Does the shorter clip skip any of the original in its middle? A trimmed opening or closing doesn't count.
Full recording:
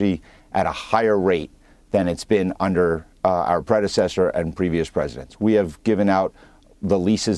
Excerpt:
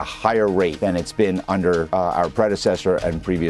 yes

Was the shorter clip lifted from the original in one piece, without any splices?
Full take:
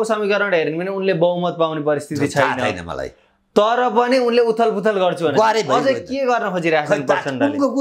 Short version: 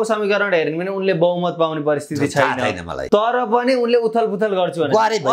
no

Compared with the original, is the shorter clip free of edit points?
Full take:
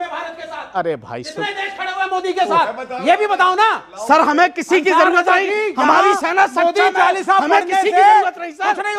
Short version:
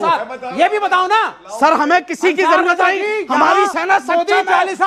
yes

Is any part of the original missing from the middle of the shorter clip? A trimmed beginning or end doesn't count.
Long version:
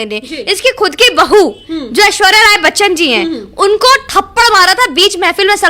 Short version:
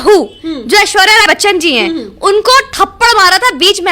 yes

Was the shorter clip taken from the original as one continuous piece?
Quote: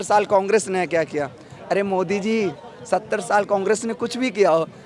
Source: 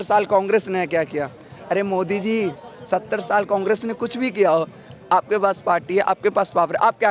yes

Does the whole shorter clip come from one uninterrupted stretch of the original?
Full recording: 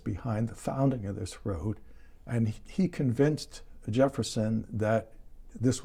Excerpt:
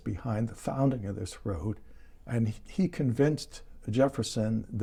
yes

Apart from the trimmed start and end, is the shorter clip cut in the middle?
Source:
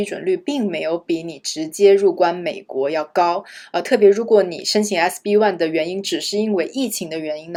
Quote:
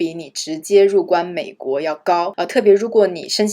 yes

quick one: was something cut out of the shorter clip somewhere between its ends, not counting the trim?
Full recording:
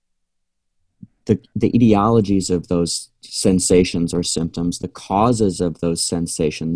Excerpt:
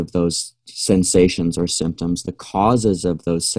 no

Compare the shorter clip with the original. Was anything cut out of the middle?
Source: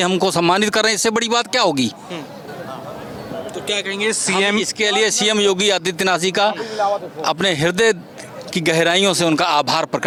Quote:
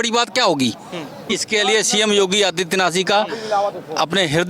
yes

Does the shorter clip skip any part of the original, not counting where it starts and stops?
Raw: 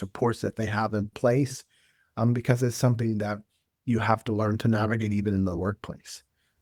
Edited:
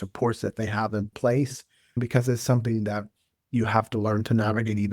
yes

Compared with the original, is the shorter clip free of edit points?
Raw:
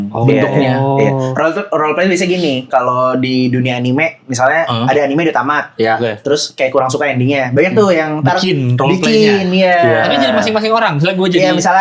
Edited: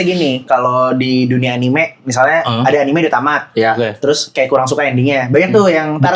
yes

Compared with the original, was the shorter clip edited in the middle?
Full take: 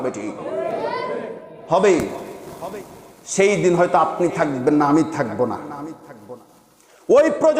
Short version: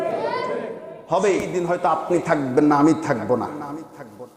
yes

